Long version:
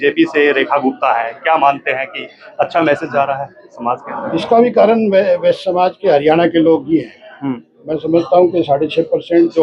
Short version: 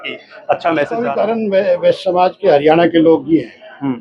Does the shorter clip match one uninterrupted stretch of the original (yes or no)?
no